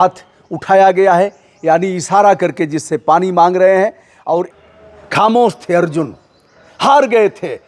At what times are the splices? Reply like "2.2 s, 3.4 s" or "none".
4.5 s